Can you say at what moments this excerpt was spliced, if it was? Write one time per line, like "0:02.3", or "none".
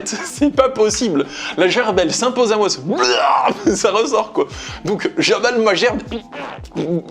none